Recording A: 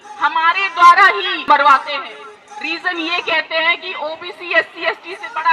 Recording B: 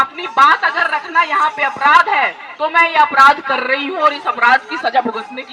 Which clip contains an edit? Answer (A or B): A